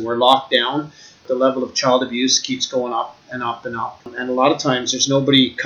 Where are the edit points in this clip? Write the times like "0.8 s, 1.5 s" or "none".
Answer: 1.2 s, 4.1 s